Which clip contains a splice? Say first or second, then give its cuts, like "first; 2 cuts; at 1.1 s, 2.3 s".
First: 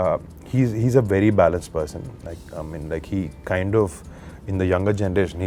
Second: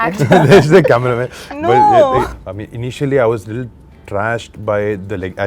second; 1 cut; at 2.3 s